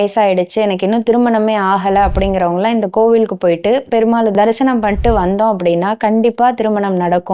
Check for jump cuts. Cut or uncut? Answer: uncut